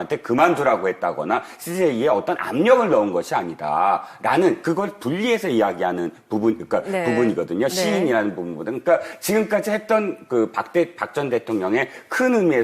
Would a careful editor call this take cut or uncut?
cut